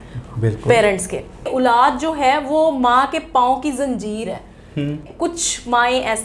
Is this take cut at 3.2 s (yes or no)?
no